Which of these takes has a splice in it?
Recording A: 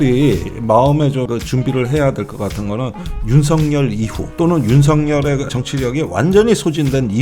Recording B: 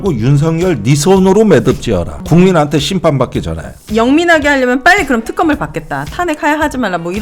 B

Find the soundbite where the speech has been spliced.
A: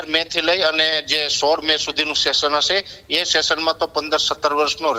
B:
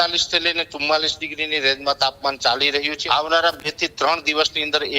B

